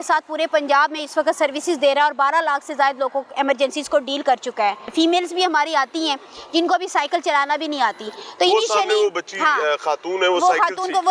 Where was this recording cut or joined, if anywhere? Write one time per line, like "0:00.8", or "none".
none